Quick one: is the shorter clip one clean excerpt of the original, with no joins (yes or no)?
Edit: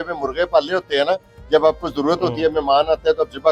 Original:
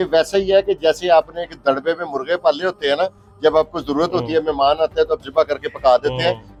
yes